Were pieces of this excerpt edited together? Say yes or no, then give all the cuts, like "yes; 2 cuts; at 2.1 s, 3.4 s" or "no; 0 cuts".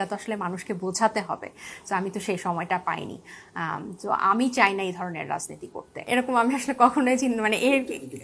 no; 0 cuts